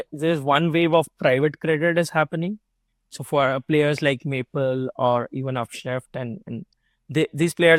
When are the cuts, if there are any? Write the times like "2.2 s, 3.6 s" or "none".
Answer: none